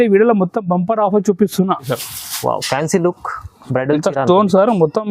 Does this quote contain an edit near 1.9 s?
yes; 1 cut; at 1.9 s

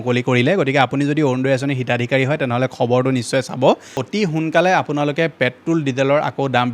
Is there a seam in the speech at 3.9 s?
yes; 1 cut; at 3.9 s

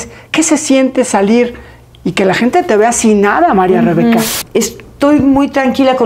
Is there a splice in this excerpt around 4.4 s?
yes; 1 cut; at 4.4 s

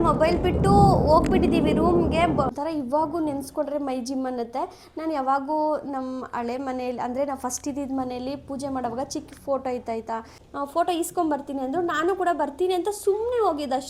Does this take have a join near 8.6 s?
no; 2 cuts; at 2.5 s, 10.4 s

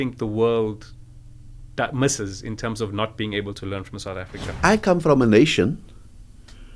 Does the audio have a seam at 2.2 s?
no; 1 cut; at 4.4 s

